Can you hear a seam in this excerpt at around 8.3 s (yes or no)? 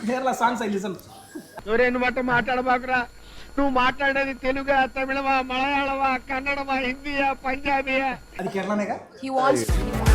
yes